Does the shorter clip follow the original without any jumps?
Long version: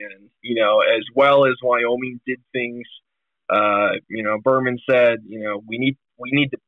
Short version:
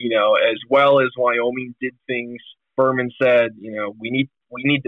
no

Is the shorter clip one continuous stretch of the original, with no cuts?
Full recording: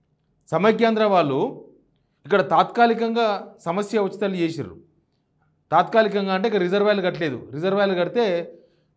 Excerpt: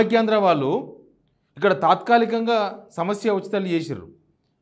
yes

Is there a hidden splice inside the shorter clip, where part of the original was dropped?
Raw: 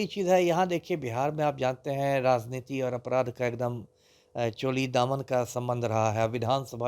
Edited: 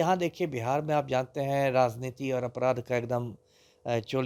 no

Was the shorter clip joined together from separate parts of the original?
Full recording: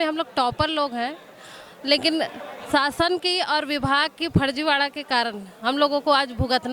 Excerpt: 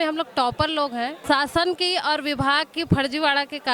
yes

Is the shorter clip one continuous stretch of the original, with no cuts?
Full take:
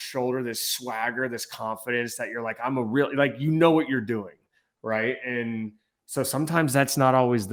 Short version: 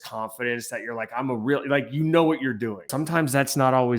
no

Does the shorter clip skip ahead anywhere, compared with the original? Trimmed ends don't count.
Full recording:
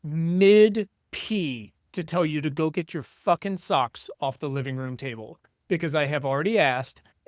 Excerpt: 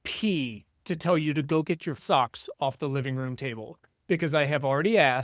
yes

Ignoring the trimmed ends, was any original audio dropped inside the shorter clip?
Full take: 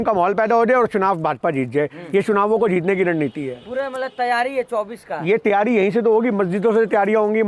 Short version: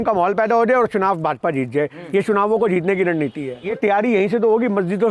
yes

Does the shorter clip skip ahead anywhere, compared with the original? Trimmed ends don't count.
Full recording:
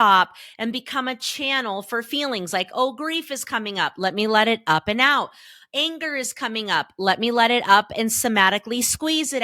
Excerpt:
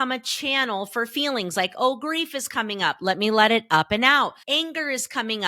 yes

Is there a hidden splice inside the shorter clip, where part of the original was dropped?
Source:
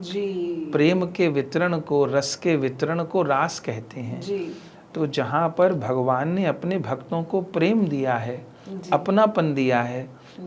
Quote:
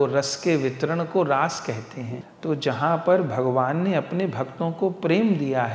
yes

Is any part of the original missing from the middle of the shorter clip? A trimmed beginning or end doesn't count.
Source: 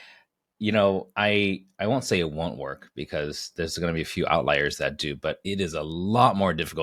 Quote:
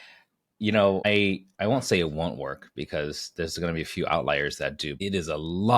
yes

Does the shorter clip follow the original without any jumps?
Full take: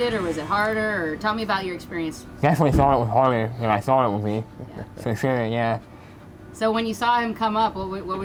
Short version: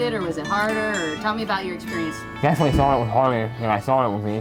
yes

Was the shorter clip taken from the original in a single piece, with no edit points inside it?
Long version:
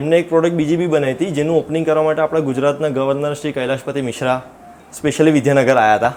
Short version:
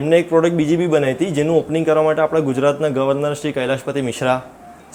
yes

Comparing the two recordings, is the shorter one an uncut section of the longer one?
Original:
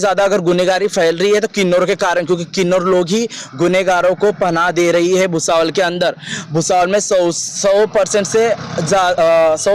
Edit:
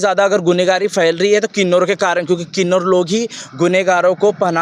yes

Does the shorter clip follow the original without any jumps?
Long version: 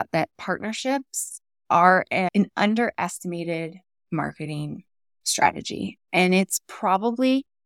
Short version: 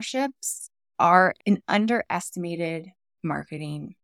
no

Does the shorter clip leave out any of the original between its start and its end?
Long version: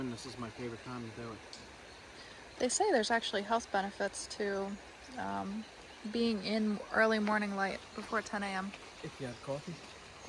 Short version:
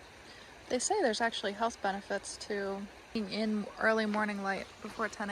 yes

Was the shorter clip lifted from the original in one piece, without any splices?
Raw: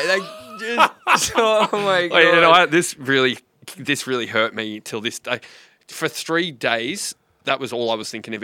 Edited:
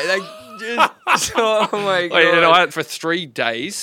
no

